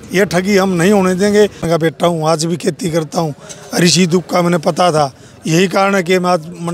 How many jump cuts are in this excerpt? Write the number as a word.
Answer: one